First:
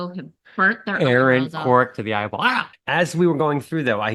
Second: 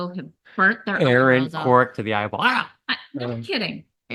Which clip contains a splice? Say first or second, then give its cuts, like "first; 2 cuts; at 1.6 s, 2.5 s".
first; 1 cut; at 2.7 s